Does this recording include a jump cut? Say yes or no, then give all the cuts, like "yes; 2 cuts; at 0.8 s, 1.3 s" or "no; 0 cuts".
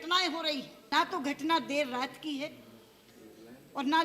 yes; 1 cut; at 0.9 s